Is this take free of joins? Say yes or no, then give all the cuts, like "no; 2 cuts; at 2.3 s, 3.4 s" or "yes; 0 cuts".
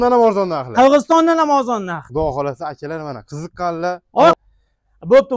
no; 1 cut; at 4.4 s